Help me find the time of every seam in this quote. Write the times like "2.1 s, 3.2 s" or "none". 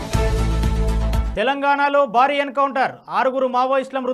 1.1 s